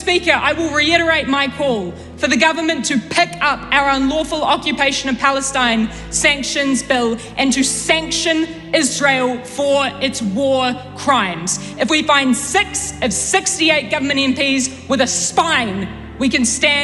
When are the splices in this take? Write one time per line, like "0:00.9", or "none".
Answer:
none